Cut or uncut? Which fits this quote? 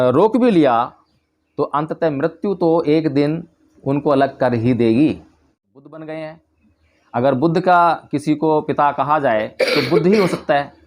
cut